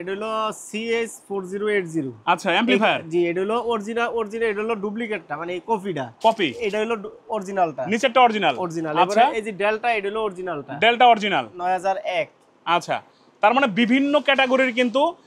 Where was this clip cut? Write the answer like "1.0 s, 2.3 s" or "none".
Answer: none